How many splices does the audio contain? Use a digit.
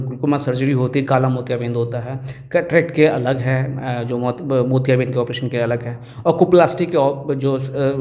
0